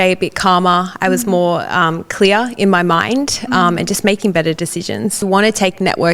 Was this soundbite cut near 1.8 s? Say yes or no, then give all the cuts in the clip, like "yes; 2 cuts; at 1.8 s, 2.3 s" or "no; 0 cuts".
no; 1 cut; at 5.2 s